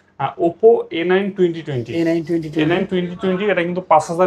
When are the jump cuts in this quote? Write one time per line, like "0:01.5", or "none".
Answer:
none